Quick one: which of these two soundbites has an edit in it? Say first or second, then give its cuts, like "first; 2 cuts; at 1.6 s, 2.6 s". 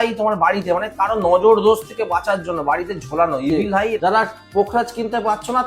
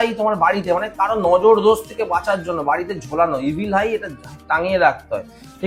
first; 1 cut; at 4.0 s